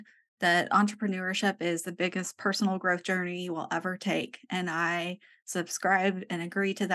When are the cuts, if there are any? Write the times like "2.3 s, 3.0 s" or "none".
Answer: none

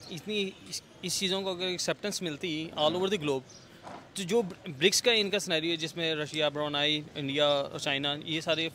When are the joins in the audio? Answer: none

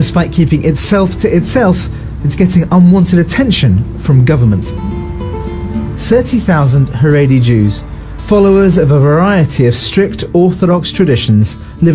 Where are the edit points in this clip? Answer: none

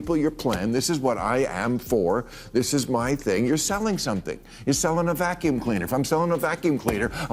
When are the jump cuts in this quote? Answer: none

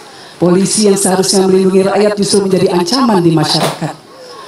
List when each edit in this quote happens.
none

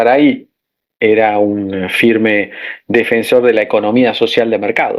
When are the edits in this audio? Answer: none

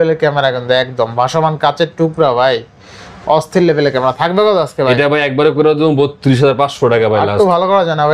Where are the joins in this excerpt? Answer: none

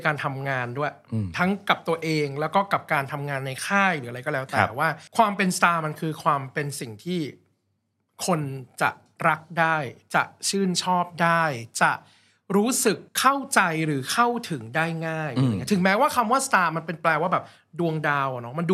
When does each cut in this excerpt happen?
none

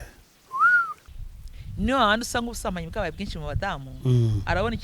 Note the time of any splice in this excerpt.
1.0 s

